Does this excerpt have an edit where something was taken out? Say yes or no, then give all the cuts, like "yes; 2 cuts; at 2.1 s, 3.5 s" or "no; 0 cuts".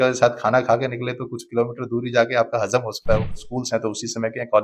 yes; 1 cut; at 3.4 s